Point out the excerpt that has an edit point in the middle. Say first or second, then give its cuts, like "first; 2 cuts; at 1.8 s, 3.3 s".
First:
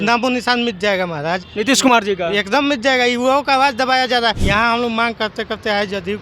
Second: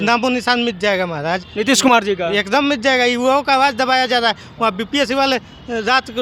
first; 1 cut; at 4.4 s